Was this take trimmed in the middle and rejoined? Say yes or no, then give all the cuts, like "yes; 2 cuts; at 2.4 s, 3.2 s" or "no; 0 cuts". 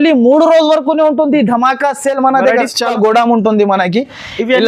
yes; 1 cut; at 2.9 s